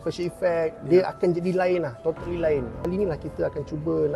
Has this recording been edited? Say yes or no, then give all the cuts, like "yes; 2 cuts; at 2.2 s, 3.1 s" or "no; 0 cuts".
yes; 1 cut; at 2.8 s